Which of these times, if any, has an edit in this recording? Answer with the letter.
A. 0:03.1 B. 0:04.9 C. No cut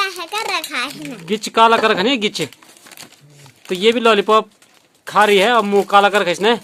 C